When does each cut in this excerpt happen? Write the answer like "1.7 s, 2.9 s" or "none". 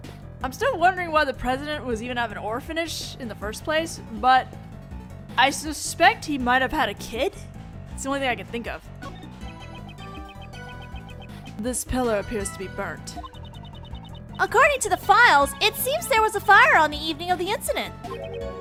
none